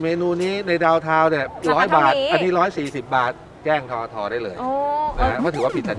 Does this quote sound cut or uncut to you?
uncut